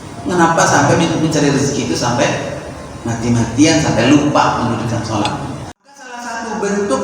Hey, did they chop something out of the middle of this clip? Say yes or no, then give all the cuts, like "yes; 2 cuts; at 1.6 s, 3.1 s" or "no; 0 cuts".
yes; 1 cut; at 6.1 s